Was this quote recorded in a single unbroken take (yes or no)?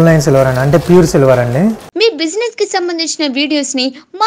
no